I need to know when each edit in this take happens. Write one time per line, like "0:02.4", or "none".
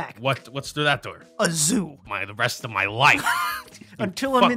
0:01.2
0:02.1